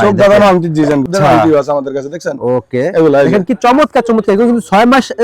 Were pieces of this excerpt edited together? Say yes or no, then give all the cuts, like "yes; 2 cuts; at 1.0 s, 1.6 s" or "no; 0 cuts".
yes; 1 cut; at 1.1 s